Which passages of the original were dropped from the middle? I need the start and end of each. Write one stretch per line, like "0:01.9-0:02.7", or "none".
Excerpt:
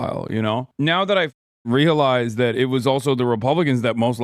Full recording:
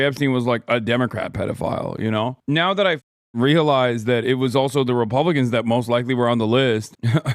none